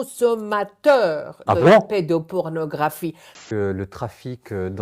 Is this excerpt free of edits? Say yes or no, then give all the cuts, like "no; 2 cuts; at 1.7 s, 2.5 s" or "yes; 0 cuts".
no; 1 cut; at 3.3 s